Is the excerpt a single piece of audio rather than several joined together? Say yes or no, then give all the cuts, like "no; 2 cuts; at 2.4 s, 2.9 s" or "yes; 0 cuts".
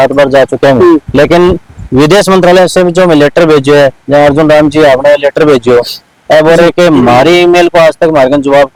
yes; 0 cuts